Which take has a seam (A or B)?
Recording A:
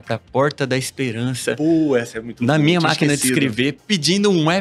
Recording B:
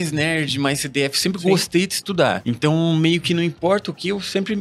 B